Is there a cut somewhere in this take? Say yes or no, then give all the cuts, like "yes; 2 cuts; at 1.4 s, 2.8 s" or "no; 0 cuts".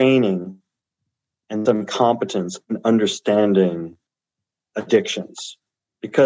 no; 0 cuts